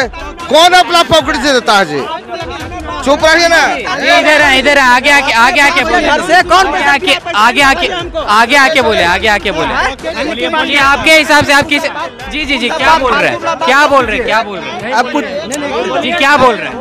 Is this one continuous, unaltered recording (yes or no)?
yes